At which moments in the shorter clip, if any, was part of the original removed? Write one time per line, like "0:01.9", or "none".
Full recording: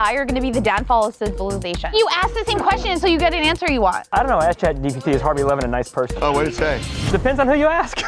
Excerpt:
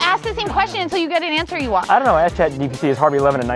0:01.8